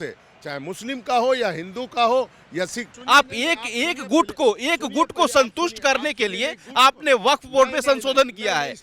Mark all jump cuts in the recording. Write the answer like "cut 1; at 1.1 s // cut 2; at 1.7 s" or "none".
cut 1; at 2.9 s